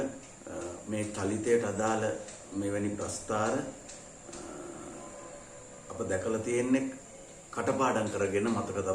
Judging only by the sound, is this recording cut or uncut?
uncut